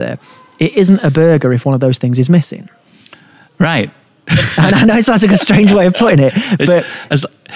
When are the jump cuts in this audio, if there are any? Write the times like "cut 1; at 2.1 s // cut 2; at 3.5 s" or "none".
none